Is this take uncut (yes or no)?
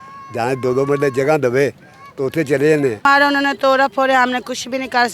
no